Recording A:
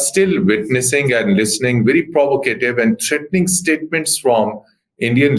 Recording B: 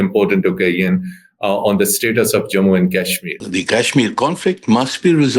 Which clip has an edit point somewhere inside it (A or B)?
B